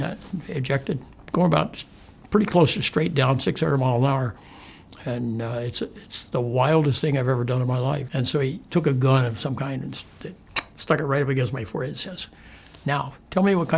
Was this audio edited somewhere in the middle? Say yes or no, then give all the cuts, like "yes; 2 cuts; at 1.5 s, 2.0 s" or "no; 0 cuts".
yes; 2 cuts; at 1.1 s, 8.1 s